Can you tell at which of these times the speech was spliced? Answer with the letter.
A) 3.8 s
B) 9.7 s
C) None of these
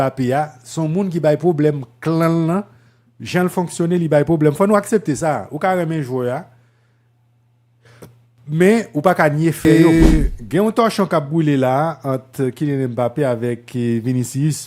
B